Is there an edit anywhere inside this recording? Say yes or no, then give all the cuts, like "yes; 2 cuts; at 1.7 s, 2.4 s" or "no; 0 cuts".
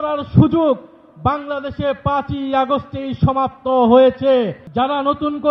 yes; 1 cut; at 4.6 s